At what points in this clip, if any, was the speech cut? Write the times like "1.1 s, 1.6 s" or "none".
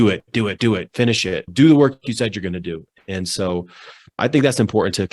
1.5 s, 4.2 s